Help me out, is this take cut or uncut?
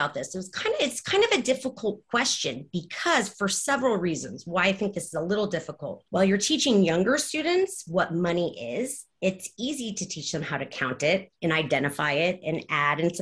cut